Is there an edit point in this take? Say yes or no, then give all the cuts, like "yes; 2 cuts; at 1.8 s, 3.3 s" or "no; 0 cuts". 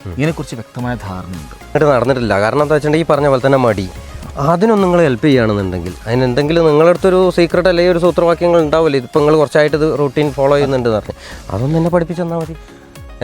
yes; 1 cut; at 1.7 s